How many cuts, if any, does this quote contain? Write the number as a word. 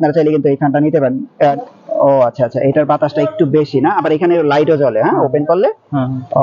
one